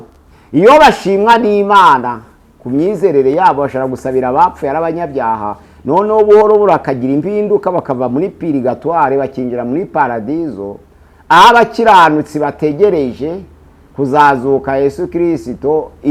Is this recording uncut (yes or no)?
yes